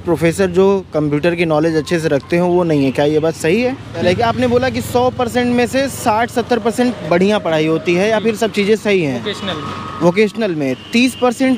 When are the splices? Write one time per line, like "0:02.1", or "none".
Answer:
0:04.0

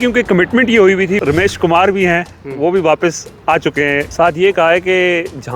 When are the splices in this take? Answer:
0:01.2
0:04.1

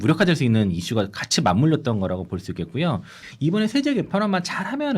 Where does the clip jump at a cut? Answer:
0:03.2

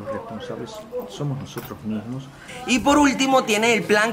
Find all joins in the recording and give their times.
0:02.5

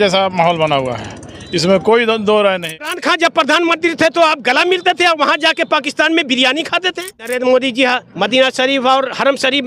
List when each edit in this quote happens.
0:02.9
0:07.3

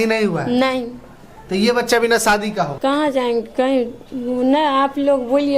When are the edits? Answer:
0:02.7

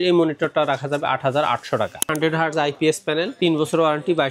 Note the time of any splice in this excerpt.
0:02.1

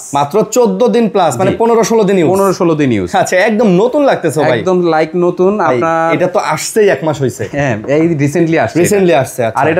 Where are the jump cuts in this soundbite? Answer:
none

